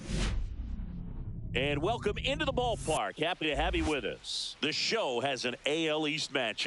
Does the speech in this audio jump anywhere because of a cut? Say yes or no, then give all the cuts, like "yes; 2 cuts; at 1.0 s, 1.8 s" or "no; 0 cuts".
yes; 2 cuts; at 1.4 s, 4.5 s